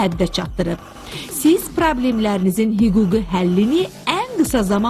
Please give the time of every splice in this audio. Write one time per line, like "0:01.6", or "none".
0:03.5